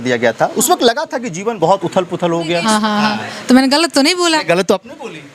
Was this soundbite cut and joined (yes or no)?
yes